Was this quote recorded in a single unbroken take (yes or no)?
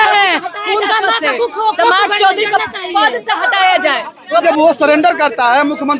no